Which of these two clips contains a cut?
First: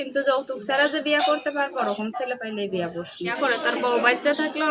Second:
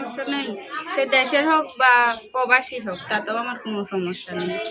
first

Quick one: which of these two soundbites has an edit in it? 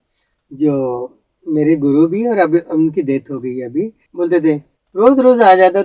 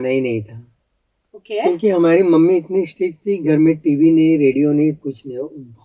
first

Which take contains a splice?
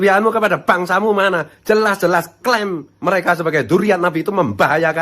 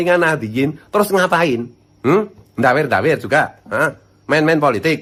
first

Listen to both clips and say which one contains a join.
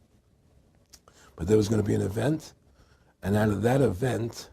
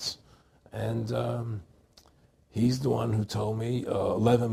first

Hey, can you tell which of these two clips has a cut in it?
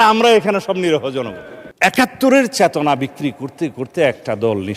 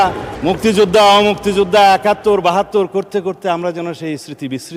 first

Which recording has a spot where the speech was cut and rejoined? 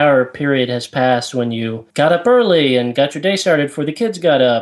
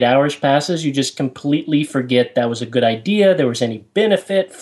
first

